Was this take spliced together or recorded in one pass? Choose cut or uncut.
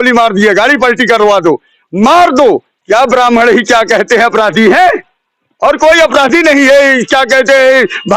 cut